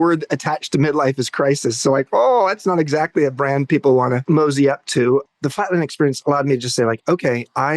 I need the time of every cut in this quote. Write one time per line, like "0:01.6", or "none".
0:04.2
0:05.3